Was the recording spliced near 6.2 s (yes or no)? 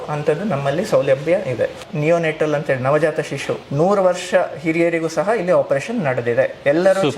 no